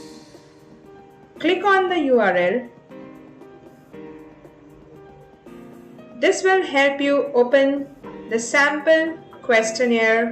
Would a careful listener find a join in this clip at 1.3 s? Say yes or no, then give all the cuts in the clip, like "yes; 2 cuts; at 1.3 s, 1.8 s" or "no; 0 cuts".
yes; 3 cuts; at 1.3 s, 2.8 s, 6.1 s